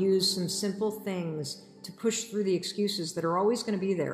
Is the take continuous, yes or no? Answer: yes